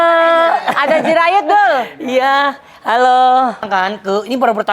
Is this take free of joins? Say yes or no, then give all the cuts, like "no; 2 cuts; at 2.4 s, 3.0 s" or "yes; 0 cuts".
no; 1 cut; at 3.7 s